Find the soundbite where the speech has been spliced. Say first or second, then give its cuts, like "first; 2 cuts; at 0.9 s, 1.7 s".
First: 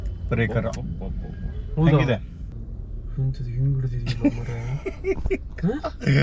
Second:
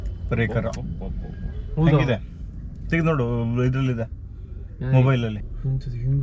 first; 1 cut; at 2.9 s